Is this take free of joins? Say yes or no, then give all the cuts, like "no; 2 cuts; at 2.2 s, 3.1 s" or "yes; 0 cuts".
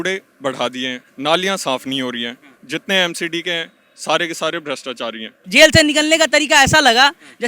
no; 2 cuts; at 1.0 s, 5.3 s